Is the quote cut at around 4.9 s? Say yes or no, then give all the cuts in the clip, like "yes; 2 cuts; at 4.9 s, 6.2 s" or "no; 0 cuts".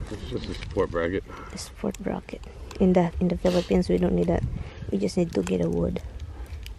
no; 0 cuts